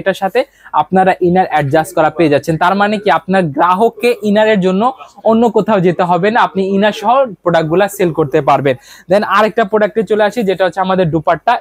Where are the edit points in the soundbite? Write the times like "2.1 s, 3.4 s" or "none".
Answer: none